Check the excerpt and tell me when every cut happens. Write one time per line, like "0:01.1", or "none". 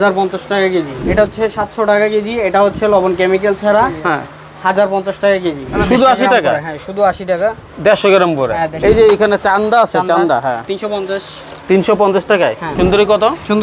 0:01.0
0:05.6
0:08.7
0:12.6